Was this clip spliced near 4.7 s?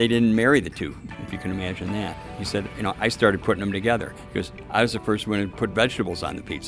no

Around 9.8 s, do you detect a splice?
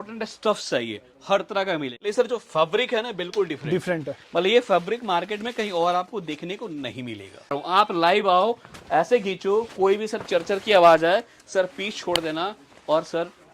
no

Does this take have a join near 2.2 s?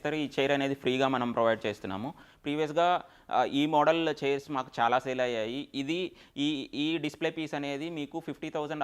no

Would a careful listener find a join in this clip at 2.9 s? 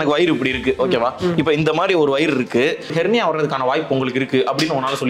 yes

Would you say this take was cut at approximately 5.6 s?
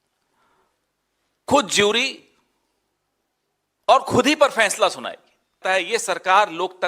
yes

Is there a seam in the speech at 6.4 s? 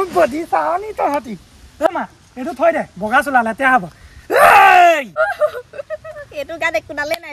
no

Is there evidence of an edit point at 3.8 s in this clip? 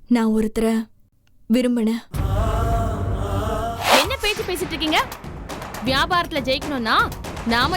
yes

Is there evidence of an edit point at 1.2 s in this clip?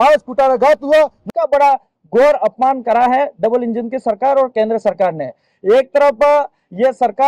yes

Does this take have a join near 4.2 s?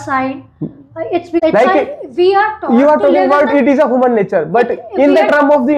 no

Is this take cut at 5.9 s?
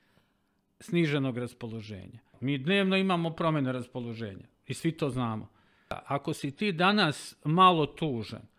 yes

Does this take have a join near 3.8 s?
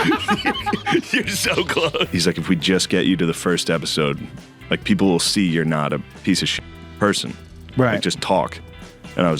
no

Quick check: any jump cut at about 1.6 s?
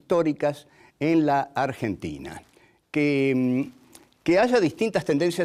no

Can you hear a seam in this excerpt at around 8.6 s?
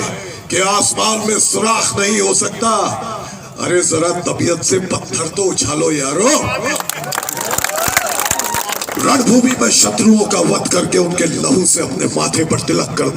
yes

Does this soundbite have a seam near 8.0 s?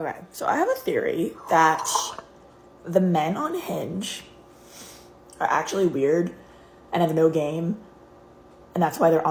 no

